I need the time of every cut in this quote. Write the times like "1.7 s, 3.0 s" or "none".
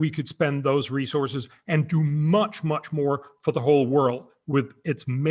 none